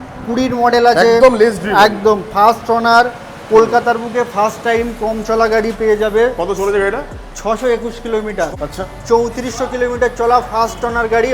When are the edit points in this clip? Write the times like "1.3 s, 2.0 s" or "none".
8.5 s